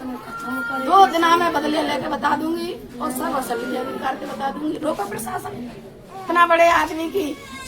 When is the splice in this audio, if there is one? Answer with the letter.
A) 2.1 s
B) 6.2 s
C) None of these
B